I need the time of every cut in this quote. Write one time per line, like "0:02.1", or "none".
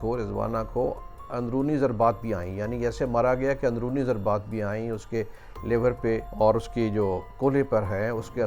0:06.3